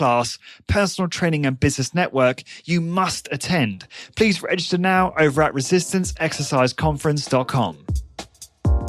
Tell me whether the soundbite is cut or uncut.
cut